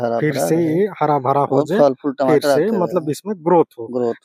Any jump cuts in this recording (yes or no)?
no